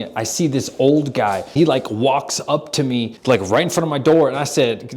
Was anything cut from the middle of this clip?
yes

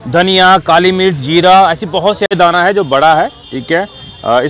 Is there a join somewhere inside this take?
yes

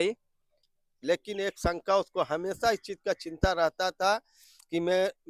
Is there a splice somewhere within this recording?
yes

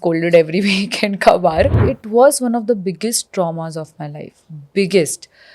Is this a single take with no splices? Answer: no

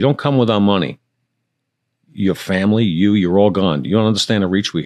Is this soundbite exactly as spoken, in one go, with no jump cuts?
yes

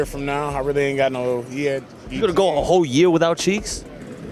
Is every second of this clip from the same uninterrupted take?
yes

